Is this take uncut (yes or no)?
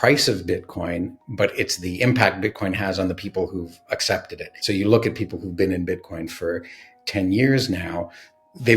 no